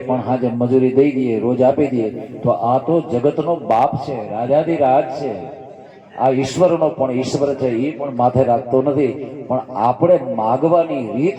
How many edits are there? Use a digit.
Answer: 0